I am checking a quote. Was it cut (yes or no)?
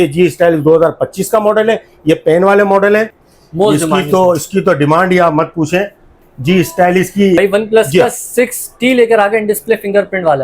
yes